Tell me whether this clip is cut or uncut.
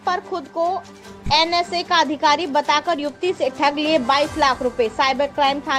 uncut